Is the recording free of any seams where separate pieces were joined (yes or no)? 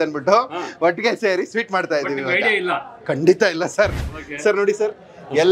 no